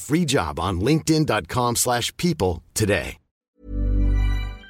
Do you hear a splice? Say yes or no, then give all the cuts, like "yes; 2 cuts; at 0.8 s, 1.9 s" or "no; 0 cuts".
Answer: yes; 1 cut; at 3.5 s